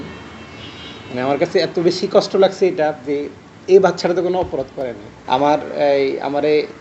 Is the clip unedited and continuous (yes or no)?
no